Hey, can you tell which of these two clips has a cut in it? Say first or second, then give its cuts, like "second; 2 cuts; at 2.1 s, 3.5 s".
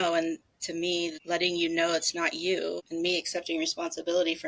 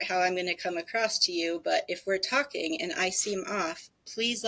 first; 2 cuts; at 1.2 s, 2.8 s